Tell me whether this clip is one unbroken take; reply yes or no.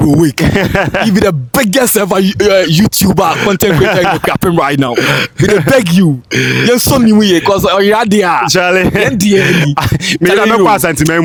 yes